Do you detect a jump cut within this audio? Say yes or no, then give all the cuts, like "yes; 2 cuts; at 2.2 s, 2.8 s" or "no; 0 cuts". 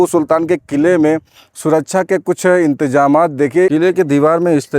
yes; 1 cut; at 3.7 s